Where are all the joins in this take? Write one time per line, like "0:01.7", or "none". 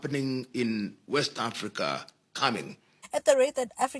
0:03.0